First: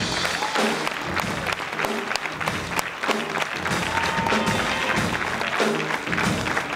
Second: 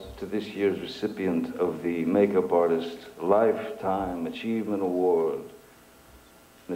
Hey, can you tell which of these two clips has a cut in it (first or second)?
second